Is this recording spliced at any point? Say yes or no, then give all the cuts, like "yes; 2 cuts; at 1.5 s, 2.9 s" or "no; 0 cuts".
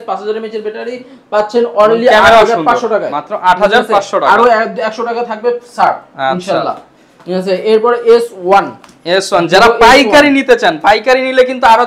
no; 0 cuts